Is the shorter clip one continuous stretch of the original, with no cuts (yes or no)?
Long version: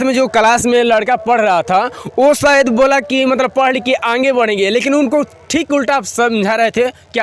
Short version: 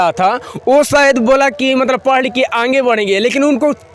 yes